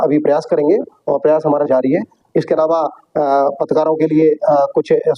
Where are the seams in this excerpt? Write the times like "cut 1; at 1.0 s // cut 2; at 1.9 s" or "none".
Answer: none